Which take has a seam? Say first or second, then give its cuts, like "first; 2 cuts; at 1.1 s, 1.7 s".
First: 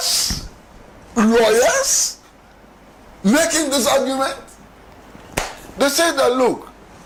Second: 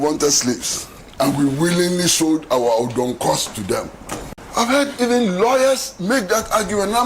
second; 1 cut; at 4.2 s